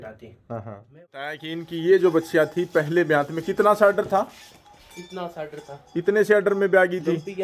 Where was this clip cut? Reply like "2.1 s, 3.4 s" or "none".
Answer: 1.4 s